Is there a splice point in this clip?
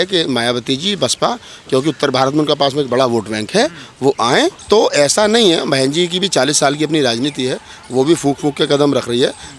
yes; 1 cut; at 4.6 s

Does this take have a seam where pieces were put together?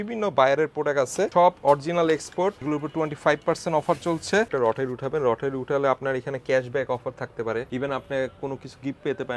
yes; 4 cuts; at 1.3 s, 2.6 s, 4.5 s, 7.7 s

